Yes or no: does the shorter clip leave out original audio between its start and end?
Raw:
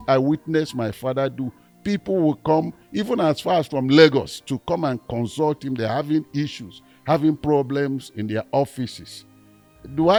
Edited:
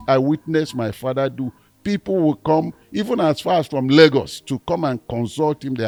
no